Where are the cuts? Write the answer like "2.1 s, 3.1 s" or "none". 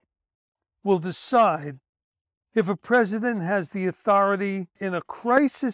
4.8 s